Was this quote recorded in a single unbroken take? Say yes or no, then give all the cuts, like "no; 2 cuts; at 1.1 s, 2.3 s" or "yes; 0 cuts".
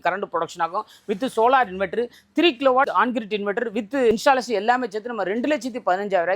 no; 2 cuts; at 2.9 s, 4.1 s